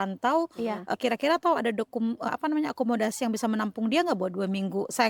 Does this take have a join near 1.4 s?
no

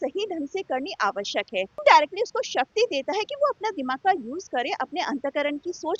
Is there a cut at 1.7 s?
yes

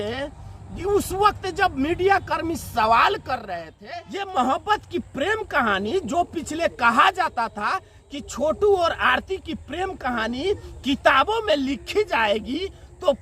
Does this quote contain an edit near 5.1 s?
no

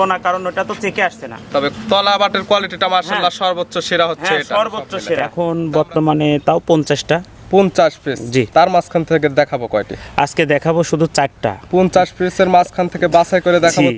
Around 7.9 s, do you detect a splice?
no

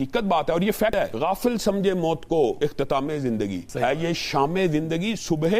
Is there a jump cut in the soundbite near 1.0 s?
yes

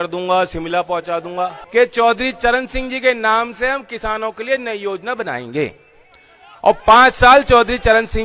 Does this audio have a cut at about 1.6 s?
yes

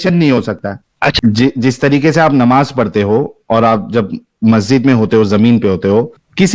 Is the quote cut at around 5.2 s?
no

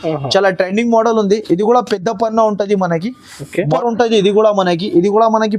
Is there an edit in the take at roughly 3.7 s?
yes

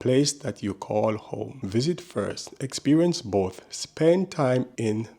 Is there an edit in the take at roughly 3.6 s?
no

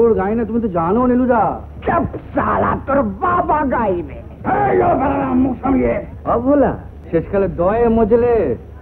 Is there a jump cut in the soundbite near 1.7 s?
no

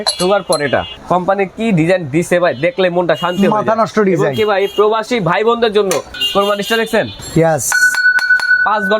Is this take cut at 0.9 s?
yes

